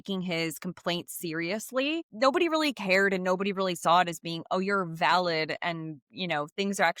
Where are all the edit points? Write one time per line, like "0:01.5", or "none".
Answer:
0:02.1